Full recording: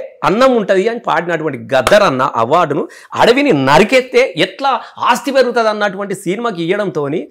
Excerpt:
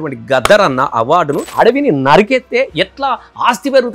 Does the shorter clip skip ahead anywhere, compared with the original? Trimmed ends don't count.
yes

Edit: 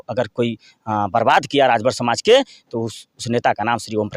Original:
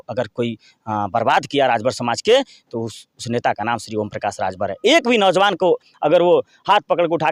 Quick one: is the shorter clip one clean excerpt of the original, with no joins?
yes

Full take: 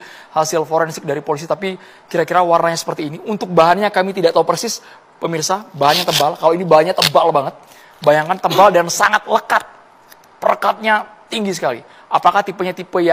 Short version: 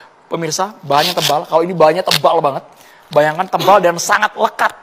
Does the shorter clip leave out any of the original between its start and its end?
no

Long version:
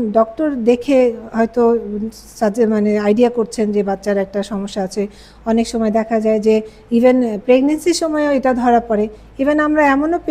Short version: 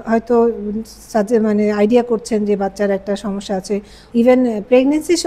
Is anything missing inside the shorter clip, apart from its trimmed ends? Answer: yes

